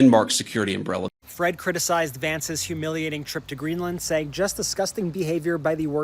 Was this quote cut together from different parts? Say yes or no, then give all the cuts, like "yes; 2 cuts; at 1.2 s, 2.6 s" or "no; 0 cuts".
yes; 1 cut; at 1.0 s